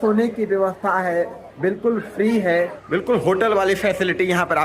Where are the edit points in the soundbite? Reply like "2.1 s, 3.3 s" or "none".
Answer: 2.8 s